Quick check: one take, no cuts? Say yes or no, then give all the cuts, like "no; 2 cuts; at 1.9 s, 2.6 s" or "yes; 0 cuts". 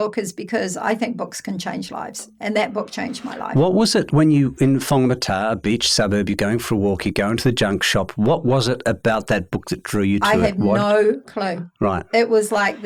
yes; 0 cuts